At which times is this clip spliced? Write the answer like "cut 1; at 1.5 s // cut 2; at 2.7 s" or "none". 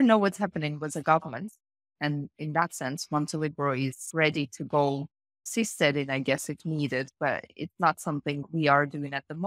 none